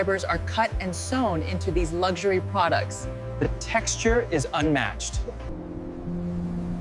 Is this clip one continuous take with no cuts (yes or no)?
no